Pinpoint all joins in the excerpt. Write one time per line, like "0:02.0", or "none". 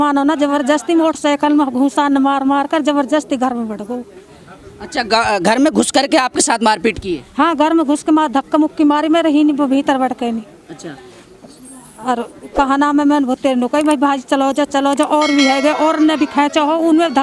none